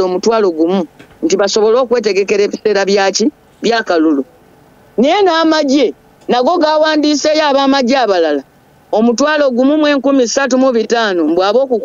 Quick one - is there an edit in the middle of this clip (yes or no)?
no